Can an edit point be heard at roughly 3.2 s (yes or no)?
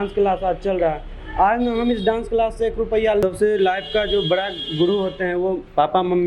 yes